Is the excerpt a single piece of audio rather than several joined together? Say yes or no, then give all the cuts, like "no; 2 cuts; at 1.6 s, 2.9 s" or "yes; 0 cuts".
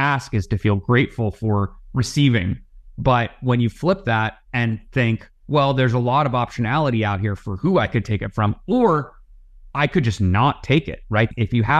no; 2 cuts; at 4.4 s, 5.3 s